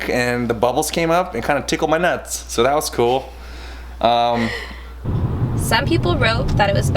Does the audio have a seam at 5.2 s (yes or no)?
yes